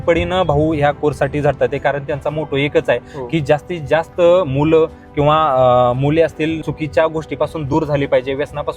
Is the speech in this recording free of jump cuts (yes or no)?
no